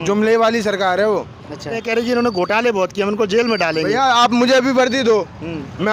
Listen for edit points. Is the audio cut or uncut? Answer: cut